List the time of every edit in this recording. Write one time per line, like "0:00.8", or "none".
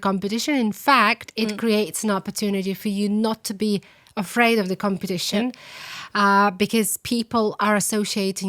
none